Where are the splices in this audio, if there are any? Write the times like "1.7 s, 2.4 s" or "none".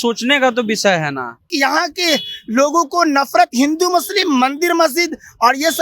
1.5 s